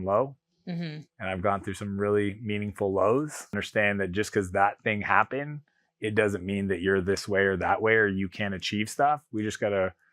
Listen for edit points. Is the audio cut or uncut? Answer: cut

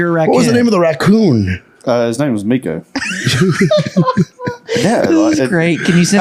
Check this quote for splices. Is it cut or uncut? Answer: uncut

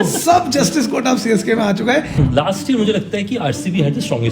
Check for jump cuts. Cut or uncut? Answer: cut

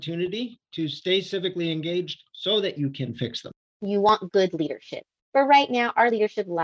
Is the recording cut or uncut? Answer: cut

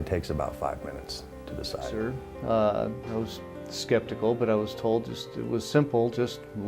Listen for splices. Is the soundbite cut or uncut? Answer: cut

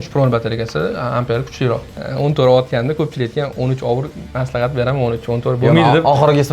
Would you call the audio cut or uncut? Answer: cut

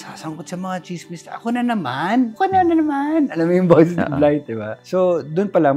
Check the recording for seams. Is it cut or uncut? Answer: uncut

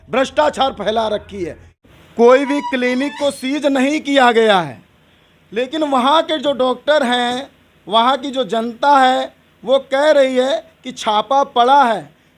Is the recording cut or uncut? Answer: cut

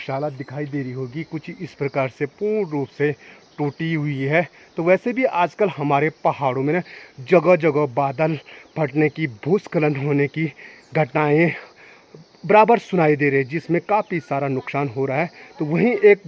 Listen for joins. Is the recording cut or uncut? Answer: uncut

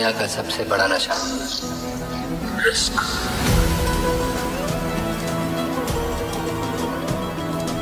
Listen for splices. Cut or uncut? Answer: cut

